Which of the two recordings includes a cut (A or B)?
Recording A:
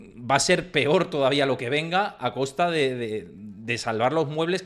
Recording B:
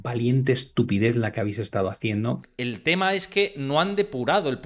B